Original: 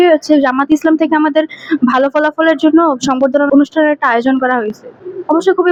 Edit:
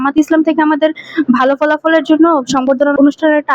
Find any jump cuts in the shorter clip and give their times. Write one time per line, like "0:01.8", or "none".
none